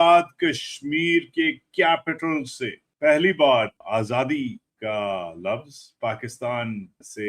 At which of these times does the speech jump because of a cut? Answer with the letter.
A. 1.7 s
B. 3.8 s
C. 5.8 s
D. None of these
B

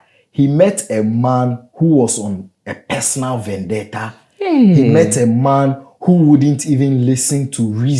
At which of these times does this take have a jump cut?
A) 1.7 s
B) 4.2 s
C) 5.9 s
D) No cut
D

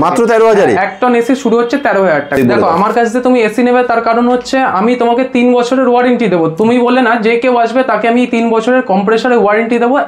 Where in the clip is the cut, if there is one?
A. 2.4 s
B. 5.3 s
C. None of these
A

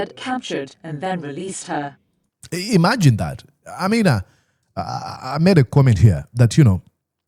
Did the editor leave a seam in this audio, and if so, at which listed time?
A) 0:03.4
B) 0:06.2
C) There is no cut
C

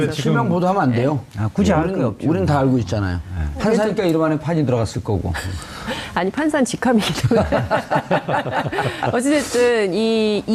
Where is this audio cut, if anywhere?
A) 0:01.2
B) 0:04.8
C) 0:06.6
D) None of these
B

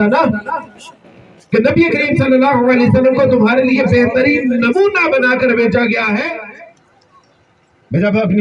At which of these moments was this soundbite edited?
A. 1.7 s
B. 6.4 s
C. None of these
B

